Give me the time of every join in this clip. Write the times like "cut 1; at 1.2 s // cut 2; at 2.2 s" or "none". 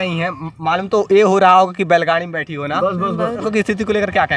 cut 1; at 3.5 s